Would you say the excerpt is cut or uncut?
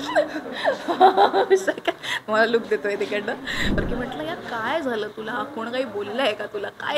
cut